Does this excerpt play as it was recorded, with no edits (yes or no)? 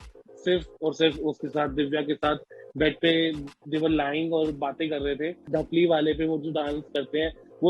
no